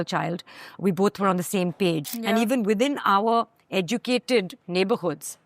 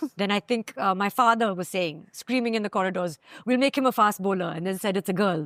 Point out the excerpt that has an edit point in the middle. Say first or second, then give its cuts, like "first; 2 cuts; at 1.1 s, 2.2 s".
first; 1 cut; at 2.1 s